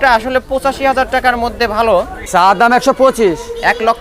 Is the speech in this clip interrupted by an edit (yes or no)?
yes